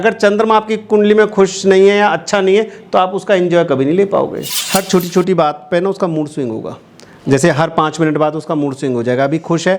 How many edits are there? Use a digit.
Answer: 1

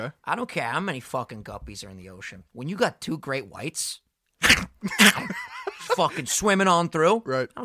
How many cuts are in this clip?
0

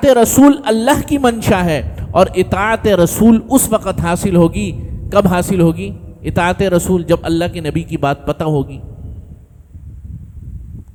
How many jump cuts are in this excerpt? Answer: 0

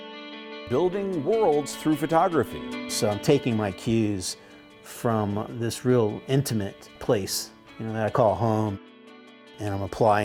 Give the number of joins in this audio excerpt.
0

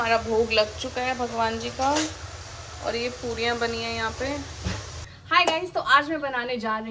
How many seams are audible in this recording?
1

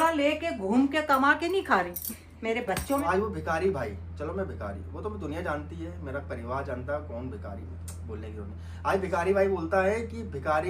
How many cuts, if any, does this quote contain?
1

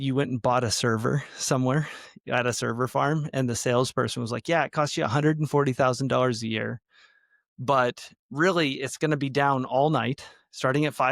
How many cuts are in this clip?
0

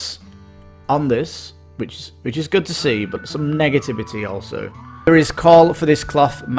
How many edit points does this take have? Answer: 1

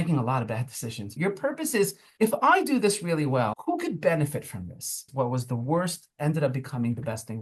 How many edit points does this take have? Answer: 4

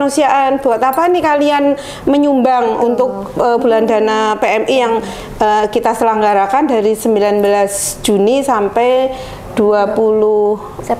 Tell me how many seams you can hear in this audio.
0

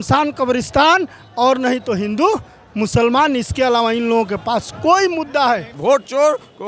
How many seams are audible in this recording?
1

